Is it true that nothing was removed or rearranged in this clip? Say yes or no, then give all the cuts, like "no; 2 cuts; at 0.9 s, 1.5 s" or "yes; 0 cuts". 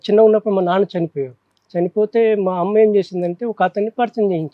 yes; 0 cuts